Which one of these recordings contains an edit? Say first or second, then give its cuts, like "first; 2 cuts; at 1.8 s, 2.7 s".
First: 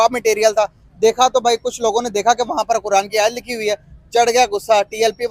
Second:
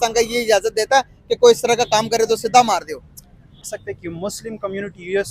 second; 1 cut; at 3.7 s